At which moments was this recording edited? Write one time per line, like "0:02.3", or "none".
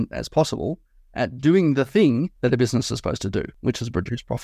0:02.3
0:03.5